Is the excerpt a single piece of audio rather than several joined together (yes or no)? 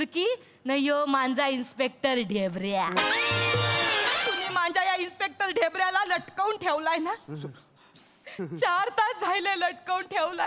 no